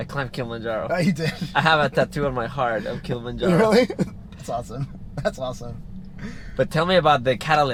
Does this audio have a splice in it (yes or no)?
no